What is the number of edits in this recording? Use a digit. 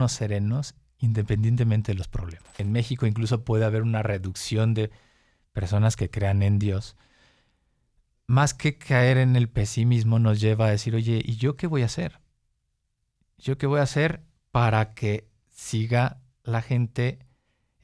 1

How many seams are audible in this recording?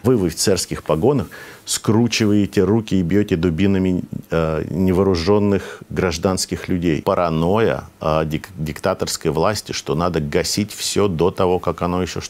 1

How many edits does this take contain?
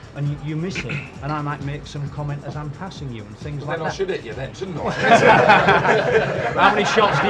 0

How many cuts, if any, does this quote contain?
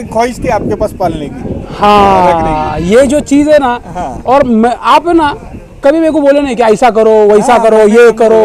0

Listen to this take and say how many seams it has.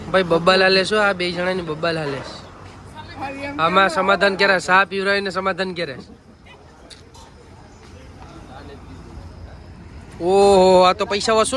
0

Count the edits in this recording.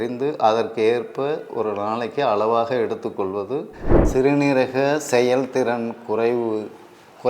1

